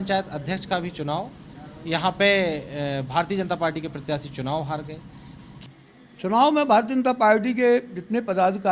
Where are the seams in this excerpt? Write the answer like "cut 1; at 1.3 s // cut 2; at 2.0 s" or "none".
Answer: cut 1; at 5.5 s